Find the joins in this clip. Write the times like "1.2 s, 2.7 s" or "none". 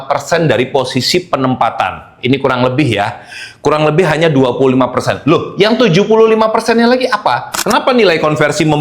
7.6 s